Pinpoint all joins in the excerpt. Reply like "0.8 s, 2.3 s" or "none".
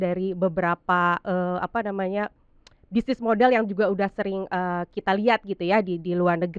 none